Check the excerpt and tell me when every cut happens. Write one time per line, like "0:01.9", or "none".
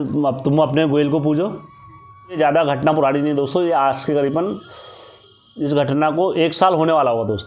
0:02.4